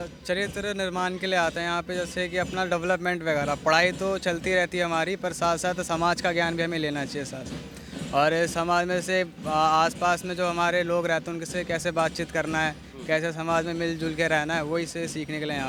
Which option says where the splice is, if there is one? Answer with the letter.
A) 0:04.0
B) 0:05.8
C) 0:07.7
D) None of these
D